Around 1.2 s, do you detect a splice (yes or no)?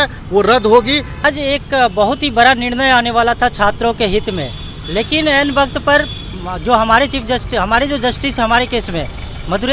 yes